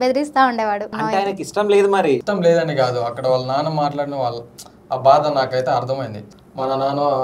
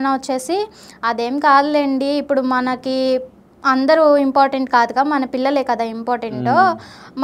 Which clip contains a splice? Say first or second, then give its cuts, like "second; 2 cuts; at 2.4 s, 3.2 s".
first; 3 cuts; at 1.0 s, 2.3 s, 6.3 s